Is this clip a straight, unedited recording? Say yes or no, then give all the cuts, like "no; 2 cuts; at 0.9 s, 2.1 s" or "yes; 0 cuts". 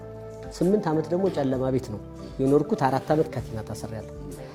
yes; 0 cuts